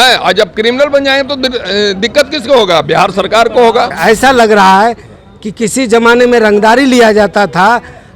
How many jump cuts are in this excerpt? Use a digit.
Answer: 1